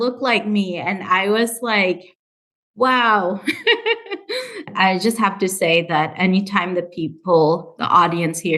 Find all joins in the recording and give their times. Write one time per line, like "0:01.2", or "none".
0:04.5